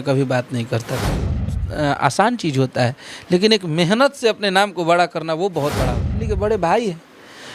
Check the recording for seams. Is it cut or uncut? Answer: cut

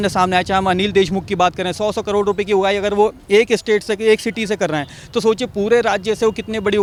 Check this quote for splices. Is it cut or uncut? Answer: uncut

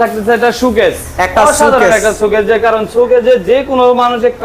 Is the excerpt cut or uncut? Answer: uncut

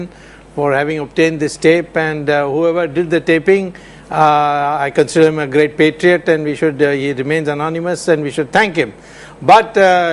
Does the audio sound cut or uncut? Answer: cut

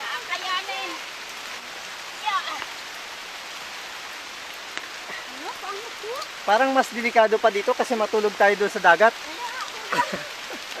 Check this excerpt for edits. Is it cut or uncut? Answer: uncut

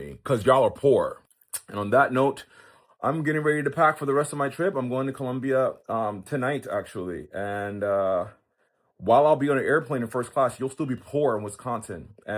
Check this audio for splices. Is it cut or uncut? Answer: cut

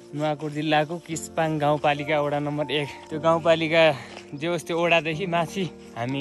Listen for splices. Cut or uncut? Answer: uncut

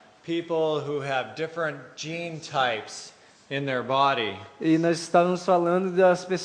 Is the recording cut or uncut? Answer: uncut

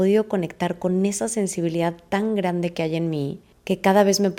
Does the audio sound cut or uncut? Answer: uncut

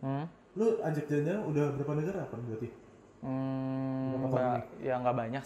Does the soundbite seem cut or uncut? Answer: uncut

